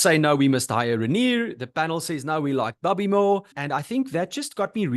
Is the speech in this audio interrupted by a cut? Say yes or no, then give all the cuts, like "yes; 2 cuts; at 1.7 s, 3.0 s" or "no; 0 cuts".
yes; 1 cut; at 3.6 s